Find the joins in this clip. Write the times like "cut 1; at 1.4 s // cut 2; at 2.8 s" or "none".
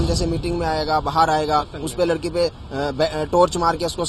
none

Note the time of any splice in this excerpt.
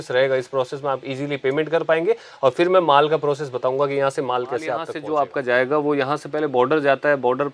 cut 1; at 4.9 s

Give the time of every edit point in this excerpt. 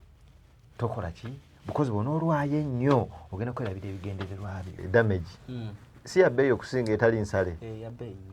cut 1; at 4.8 s

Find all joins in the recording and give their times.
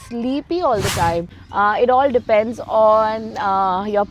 cut 1; at 1.4 s

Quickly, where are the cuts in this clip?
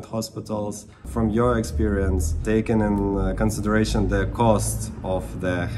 cut 1; at 1.0 s // cut 2; at 2.4 s

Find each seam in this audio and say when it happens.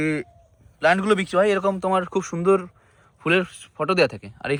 none

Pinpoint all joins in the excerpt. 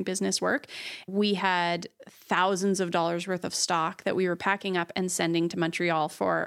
cut 1; at 1.1 s

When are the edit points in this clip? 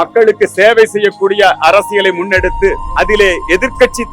cut 1; at 2.8 s

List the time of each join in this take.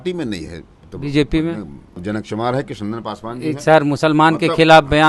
cut 1; at 2.0 s

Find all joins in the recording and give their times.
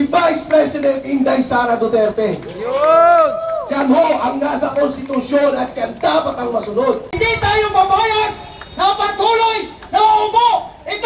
cut 1; at 7.1 s

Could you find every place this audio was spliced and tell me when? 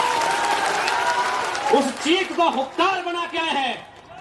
none

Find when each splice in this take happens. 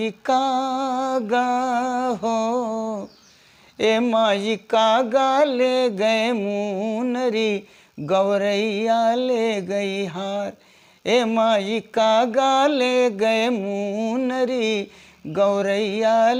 none

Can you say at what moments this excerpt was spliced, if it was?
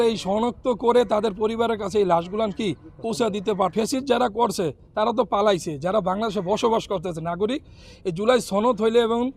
cut 1; at 3.7 s

